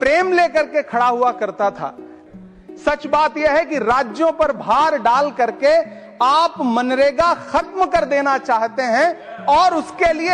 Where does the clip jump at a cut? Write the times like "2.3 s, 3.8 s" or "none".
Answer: 2.2 s